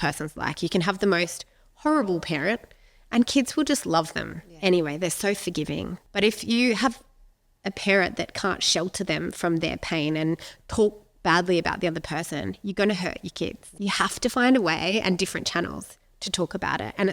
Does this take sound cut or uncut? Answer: cut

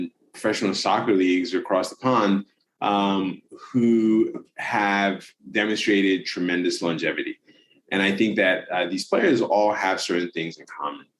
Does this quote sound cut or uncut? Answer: uncut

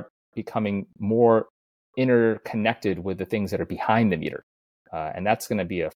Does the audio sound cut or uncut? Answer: uncut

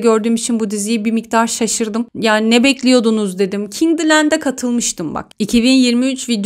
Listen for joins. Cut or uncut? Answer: uncut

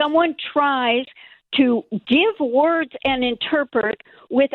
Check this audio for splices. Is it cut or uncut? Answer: uncut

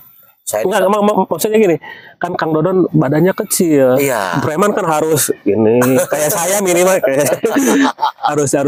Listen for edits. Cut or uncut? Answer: uncut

